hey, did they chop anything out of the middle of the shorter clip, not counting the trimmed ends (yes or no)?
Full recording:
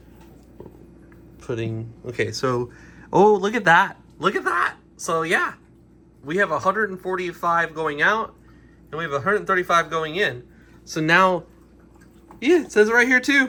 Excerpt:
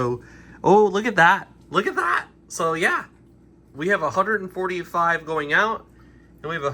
no